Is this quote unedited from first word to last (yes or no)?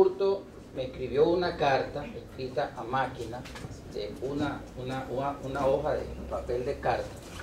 no